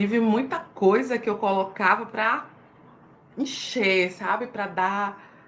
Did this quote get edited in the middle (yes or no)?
no